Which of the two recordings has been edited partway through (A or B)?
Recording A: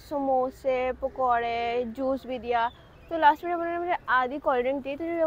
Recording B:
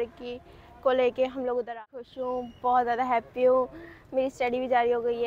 B